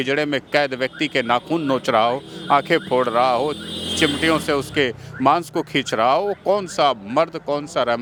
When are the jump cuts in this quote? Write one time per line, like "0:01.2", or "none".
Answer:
none